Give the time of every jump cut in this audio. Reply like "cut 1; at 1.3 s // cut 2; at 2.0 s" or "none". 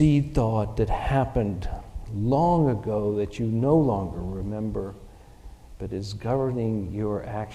none

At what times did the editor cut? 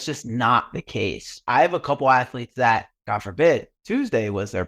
cut 1; at 1.4 s // cut 2; at 3.0 s

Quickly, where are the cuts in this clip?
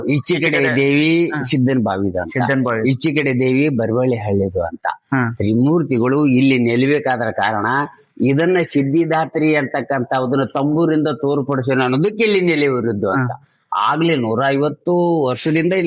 none

